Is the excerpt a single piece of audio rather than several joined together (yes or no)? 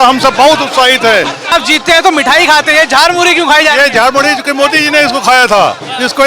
no